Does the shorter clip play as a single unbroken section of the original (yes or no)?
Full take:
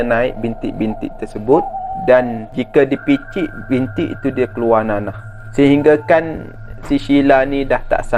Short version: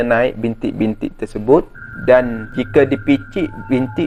yes